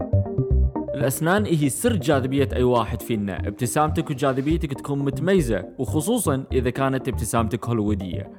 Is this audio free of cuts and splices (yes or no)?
no